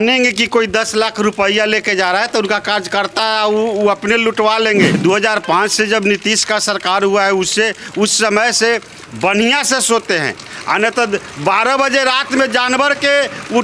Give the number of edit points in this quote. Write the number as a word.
one